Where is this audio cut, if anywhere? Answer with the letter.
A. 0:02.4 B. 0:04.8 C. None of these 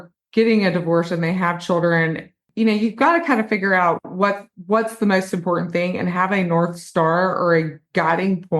A